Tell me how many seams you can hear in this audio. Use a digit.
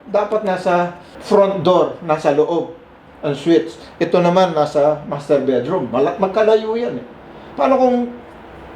1